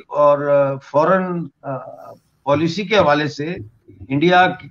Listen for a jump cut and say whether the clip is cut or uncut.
uncut